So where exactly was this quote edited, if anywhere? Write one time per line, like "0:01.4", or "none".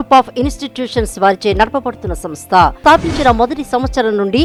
none